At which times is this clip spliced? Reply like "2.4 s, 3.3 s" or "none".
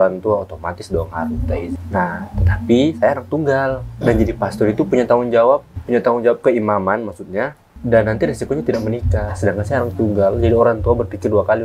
1.8 s, 5.7 s, 7.7 s